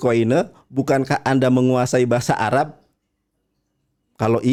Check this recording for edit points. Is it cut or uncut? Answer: uncut